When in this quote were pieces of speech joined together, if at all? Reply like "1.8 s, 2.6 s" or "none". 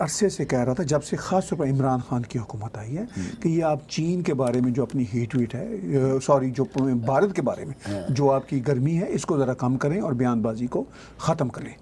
none